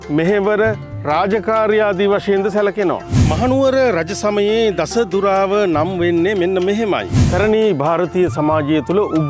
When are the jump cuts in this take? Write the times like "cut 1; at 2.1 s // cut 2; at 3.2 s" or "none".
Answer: cut 1; at 3.1 s // cut 2; at 7.2 s